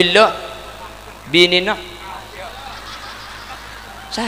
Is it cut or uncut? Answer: uncut